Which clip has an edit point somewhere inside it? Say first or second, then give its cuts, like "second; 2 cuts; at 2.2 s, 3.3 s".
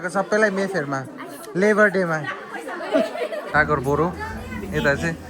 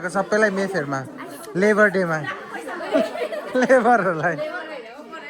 first; 1 cut; at 3.5 s